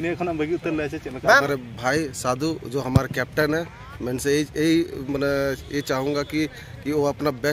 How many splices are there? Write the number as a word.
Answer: one